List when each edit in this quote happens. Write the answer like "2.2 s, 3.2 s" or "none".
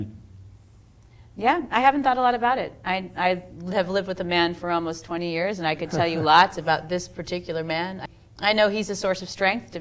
8.0 s